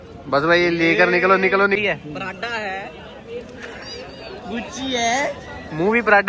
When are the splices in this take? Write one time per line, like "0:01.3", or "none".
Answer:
0:01.8